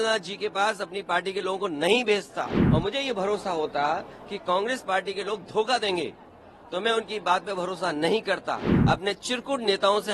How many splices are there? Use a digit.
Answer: 2